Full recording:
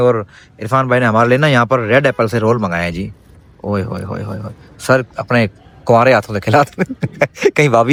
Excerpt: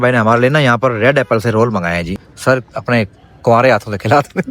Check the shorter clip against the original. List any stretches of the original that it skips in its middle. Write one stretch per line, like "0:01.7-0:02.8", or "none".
0:03.2-0:04.7